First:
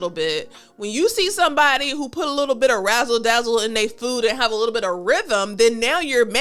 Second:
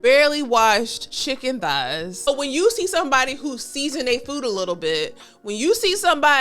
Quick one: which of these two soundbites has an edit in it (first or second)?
second